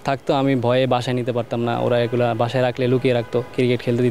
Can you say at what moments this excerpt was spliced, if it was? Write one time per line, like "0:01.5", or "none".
none